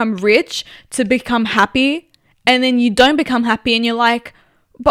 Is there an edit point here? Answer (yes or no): no